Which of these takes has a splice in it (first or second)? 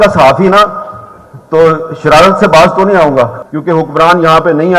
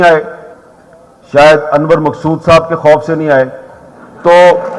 first